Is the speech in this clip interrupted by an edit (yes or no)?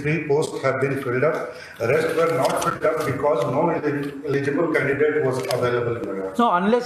no